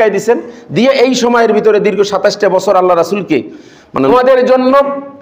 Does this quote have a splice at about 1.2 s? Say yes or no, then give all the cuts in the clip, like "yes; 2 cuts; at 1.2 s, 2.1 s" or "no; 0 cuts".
no; 1 cut; at 4.1 s